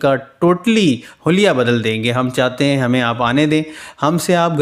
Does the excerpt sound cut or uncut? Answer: uncut